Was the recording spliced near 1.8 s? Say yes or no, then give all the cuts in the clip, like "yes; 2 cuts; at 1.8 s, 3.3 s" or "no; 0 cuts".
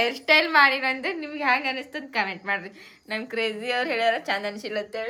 no; 0 cuts